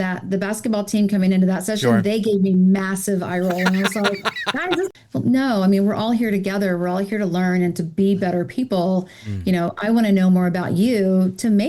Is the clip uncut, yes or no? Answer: no